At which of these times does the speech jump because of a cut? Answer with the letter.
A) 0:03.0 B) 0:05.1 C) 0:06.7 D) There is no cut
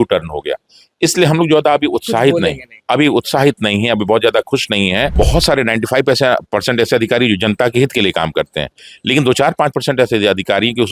B